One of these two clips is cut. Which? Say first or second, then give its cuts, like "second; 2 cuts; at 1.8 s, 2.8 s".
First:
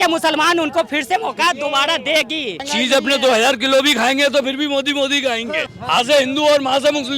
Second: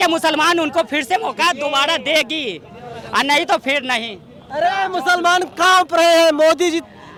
first; 2 cuts; at 2.6 s, 5.7 s